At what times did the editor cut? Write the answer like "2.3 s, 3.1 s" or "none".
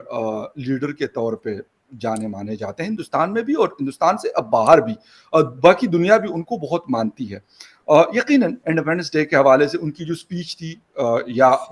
none